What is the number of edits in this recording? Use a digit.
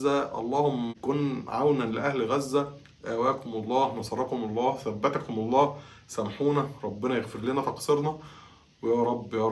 1